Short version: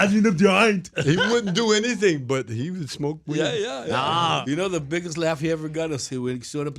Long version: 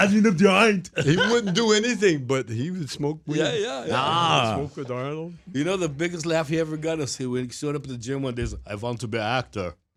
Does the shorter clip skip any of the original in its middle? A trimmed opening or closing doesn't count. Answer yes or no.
yes